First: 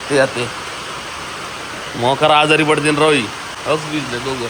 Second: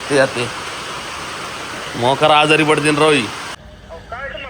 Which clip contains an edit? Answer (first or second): second